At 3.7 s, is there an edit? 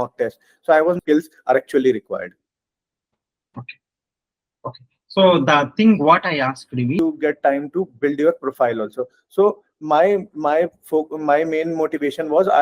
no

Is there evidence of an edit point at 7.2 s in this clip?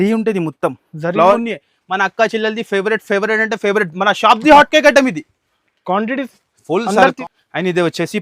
yes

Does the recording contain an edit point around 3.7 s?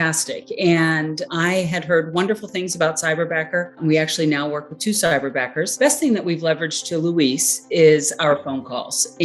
yes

